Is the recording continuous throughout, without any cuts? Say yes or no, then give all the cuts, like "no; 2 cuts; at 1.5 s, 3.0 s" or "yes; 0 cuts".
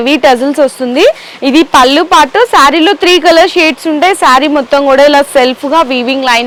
yes; 0 cuts